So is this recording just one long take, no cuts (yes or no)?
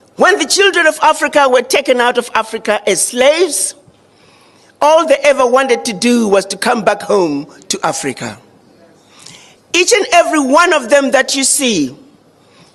yes